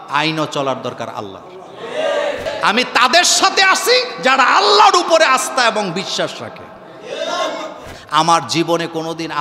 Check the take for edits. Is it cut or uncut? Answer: cut